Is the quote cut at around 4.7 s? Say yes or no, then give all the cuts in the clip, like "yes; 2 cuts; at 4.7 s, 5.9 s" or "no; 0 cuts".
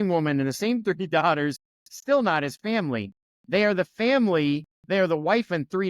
yes; 1 cut; at 4.7 s